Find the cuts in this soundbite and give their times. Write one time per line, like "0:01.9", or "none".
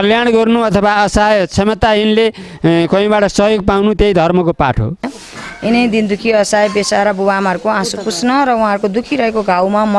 0:05.1